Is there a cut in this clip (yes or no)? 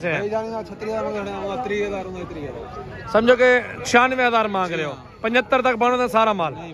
no